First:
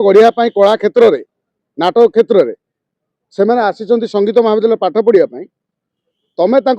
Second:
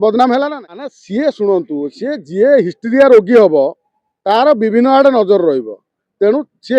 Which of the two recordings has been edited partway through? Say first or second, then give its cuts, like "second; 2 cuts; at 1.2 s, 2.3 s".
second; 1 cut; at 1.0 s